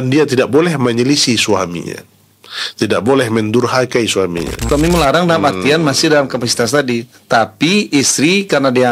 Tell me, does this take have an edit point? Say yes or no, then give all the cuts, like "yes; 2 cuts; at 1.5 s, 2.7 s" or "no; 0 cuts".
yes; 1 cut; at 4.6 s